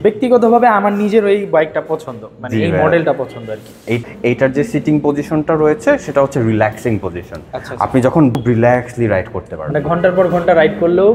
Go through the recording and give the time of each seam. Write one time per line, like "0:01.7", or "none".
0:04.0
0:08.4